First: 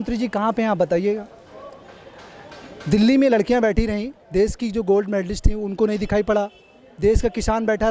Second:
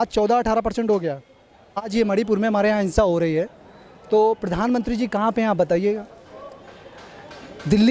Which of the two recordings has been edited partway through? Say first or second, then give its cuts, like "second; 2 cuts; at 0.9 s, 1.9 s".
second; 1 cut; at 1.9 s